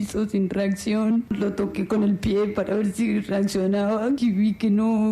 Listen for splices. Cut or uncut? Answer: cut